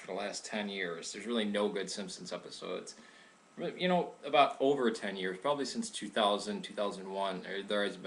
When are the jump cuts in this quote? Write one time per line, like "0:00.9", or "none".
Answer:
none